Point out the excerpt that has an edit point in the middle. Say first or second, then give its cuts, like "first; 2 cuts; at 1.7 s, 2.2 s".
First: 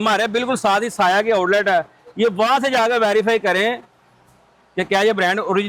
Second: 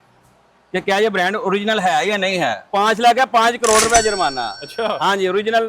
second; 1 cut; at 2.6 s